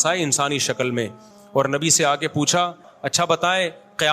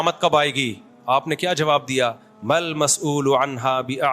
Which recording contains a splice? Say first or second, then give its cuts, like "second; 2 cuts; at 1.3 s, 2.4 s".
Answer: first; 1 cut; at 2.9 s